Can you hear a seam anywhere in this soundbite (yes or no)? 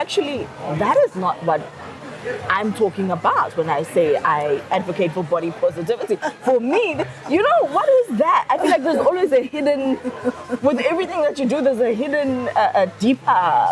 no